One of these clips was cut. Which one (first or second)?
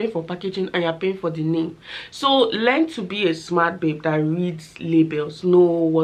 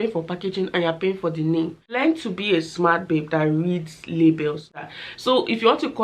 second